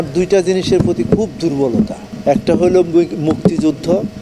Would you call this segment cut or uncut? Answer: cut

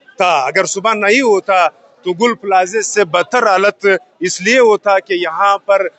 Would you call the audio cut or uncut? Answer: uncut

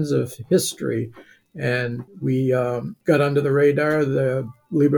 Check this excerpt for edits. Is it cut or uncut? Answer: cut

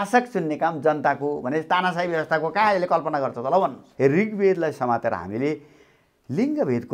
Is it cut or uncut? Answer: cut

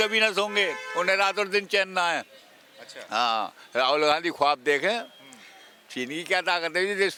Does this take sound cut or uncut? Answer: uncut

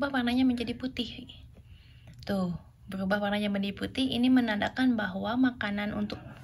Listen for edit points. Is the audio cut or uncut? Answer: uncut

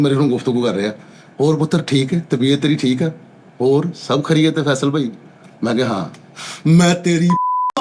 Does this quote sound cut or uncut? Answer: uncut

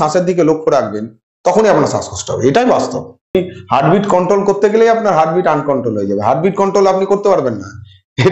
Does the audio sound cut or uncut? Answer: cut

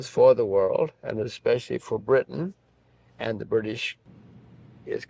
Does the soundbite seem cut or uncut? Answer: cut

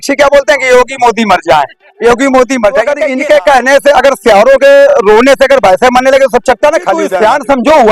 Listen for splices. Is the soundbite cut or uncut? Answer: cut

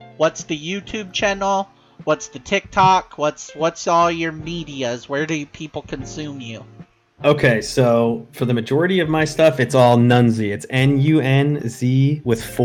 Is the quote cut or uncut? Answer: uncut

